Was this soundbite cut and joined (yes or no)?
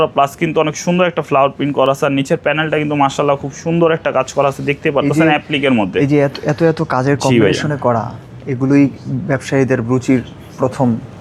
no